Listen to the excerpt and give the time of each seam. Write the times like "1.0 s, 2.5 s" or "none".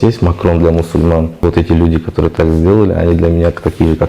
1.4 s

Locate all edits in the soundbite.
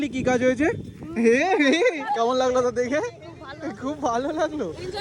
2.0 s

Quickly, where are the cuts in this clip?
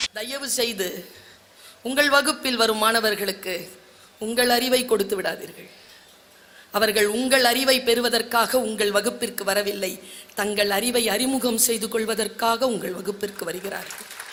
none

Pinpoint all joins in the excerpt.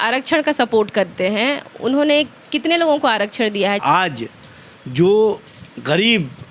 3.8 s

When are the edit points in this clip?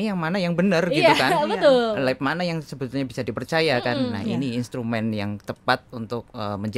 none

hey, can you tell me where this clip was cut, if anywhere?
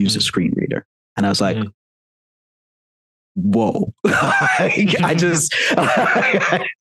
none

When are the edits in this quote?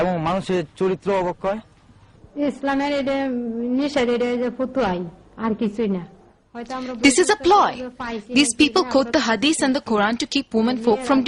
9.3 s

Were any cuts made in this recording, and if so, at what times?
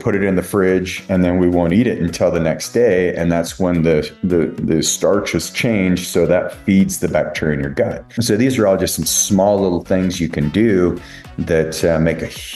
8.1 s

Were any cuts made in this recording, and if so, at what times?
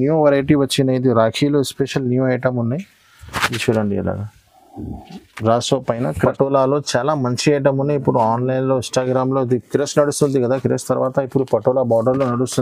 6.3 s

